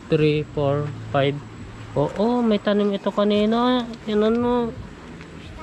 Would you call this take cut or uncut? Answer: uncut